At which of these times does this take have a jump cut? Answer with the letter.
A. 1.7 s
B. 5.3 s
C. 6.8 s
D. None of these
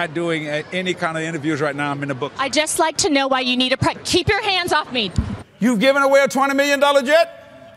B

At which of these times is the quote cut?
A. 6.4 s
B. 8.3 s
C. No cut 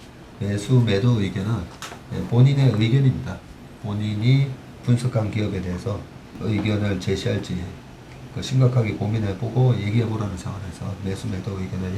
A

